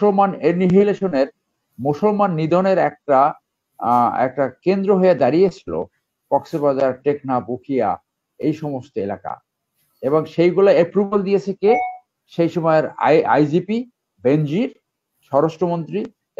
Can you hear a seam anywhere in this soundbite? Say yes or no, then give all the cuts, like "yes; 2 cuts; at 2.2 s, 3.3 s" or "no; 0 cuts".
no; 0 cuts